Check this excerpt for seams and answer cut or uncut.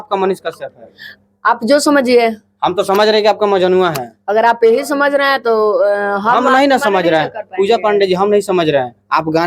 uncut